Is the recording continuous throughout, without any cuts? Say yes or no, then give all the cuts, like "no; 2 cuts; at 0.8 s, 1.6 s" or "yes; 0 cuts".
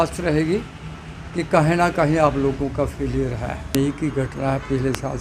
no; 1 cut; at 3.7 s